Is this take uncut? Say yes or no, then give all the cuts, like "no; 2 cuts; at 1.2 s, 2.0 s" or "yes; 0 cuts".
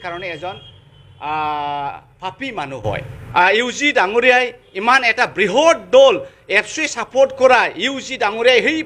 no; 1 cut; at 3.1 s